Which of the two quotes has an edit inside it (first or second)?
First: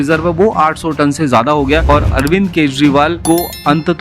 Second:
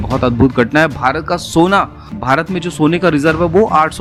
first